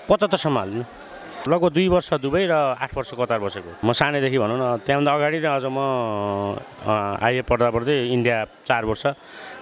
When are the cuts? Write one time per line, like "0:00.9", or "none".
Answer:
0:01.4
0:03.8